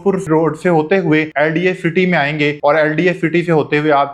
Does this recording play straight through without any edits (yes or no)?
yes